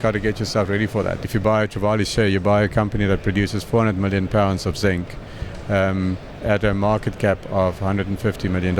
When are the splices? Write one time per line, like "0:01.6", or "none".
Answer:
0:01.2